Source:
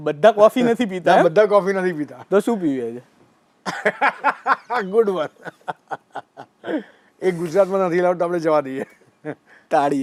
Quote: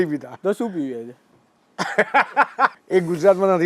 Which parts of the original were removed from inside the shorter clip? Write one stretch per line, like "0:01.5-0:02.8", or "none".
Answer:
0:04.6-0:07.1